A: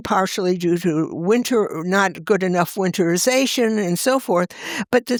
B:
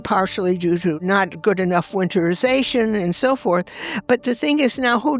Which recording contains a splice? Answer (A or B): B